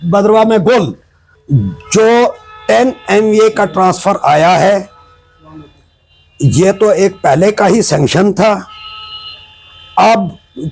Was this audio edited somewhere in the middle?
yes; 1 cut; at 1.6 s

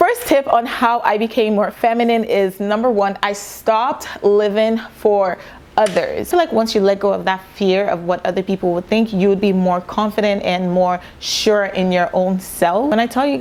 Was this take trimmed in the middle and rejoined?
no; 0 cuts

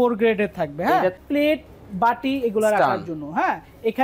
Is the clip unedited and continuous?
no; 1 cut; at 1.2 s

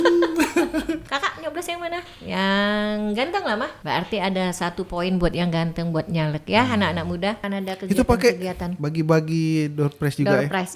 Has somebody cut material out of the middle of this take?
yes; 3 cuts; at 1.0 s, 3.8 s, 7.4 s

